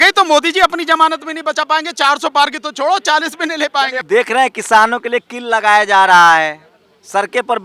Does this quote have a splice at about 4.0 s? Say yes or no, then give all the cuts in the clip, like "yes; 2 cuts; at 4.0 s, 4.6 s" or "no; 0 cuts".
yes; 1 cut; at 4.0 s